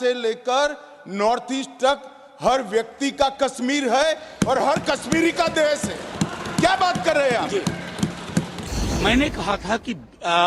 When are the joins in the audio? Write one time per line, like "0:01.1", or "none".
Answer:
0:08.5